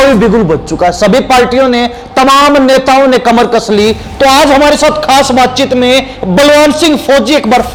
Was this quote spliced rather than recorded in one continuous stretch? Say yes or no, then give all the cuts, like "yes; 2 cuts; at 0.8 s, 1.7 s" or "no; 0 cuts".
no; 0 cuts